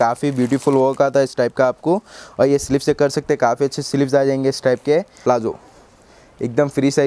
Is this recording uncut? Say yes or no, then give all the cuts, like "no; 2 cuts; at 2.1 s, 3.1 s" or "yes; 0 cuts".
yes; 0 cuts